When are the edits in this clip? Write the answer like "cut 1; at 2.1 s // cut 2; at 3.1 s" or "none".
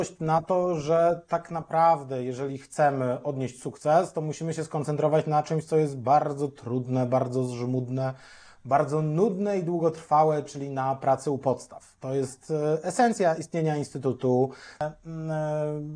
cut 1; at 14.9 s